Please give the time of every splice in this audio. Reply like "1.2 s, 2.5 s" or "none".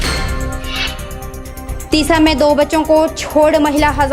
none